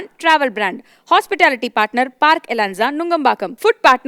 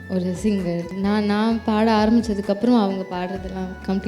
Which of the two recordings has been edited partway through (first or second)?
second